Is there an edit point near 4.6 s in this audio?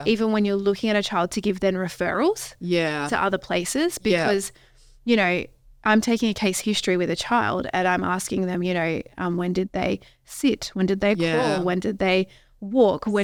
no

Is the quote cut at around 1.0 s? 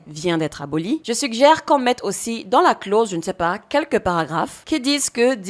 yes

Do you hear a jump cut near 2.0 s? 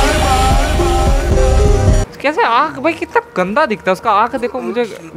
yes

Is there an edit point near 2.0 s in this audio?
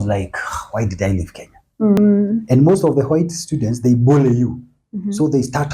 yes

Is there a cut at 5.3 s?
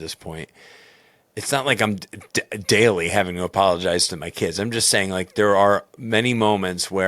no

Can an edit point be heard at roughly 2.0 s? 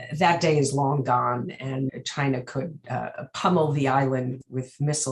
yes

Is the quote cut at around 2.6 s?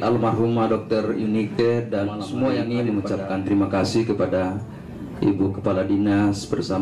yes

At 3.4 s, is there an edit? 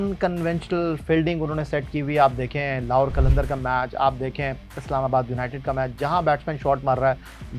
no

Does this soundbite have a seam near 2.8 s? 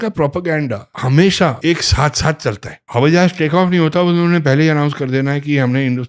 yes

